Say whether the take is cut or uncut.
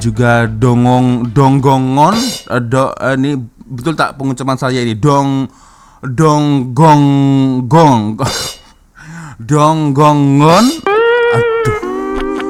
uncut